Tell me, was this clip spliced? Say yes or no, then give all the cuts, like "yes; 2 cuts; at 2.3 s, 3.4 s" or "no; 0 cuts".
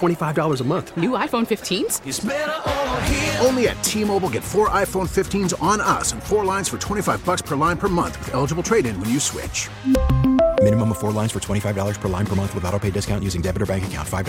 no; 0 cuts